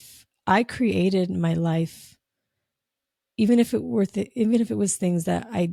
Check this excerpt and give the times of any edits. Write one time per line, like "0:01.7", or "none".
none